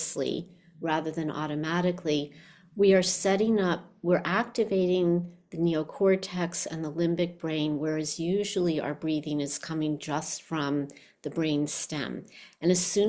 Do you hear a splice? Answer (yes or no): no